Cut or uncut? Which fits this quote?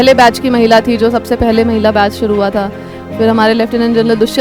uncut